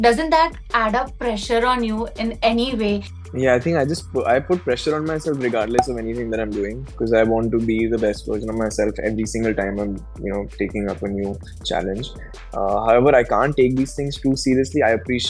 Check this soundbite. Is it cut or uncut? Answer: cut